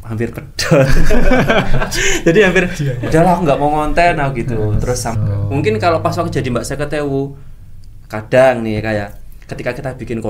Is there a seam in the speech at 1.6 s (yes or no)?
no